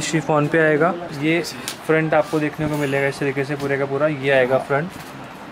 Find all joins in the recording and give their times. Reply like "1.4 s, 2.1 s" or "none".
1.1 s